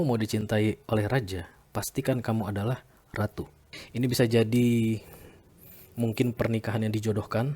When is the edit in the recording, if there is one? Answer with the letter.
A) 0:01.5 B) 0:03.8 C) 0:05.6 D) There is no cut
B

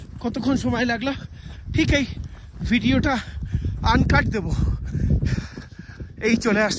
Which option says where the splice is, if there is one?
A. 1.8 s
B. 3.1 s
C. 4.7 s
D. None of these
D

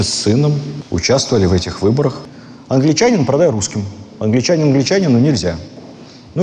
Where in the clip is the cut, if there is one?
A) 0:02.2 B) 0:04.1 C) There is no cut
A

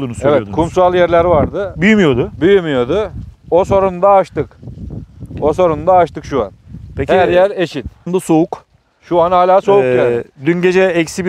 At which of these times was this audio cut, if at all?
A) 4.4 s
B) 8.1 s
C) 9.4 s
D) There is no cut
B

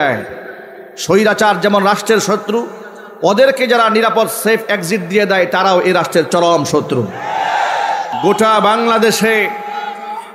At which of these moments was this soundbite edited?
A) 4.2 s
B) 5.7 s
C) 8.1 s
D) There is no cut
C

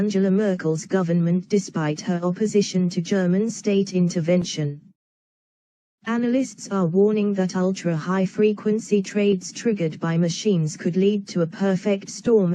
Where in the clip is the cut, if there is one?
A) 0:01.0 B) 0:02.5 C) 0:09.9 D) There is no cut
B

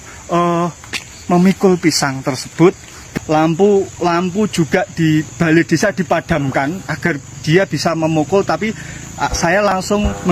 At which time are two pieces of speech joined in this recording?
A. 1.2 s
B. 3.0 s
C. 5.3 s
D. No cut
B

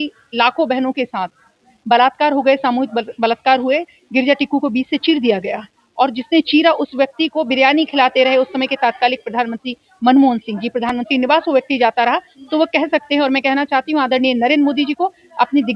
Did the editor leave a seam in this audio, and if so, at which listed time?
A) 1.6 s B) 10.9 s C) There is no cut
C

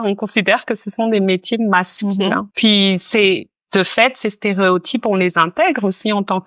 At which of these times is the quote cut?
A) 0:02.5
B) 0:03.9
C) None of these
C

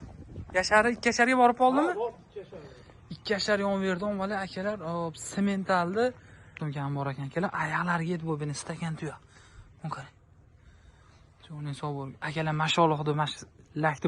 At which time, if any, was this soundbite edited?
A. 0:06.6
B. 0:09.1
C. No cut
A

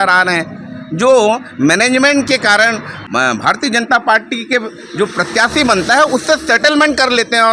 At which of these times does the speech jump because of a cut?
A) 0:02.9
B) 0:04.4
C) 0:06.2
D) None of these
A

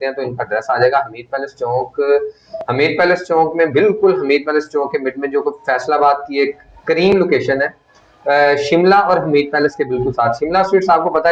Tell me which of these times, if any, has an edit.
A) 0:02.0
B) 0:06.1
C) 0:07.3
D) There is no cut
D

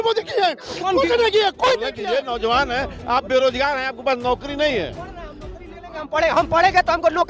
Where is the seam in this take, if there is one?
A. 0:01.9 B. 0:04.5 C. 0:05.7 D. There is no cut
A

